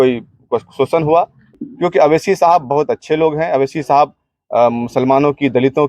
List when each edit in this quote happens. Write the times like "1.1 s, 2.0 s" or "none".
1.4 s